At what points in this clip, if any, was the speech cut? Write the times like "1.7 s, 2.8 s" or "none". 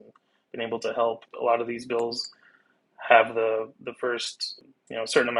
1.3 s, 4.6 s